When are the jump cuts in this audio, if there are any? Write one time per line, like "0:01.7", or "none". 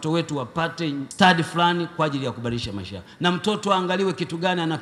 0:01.1

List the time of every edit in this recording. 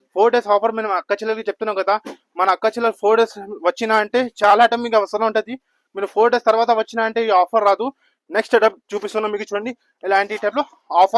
none

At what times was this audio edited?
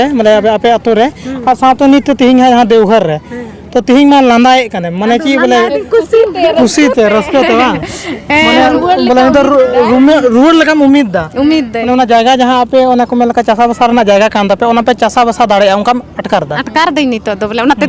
none

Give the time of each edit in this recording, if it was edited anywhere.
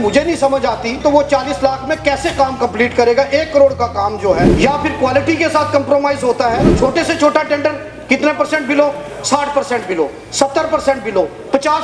0:01.0
0:04.5
0:06.7

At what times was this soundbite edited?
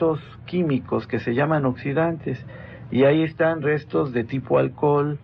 0:01.4

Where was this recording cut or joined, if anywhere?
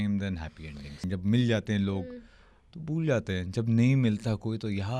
0:01.0

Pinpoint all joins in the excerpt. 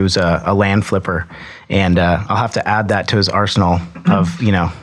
none

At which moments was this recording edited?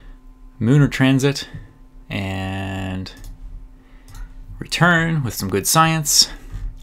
none

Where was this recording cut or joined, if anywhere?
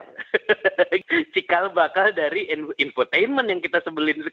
0:01.0

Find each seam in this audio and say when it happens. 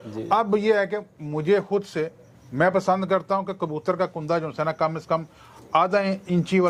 none

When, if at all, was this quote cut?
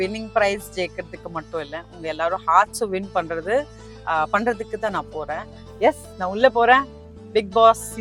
0:05.6

